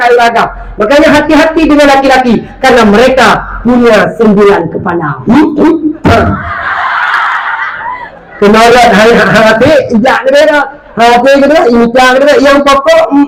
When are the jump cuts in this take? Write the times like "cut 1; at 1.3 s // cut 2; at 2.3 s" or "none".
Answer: none